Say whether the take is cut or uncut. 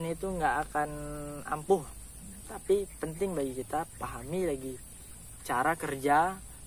uncut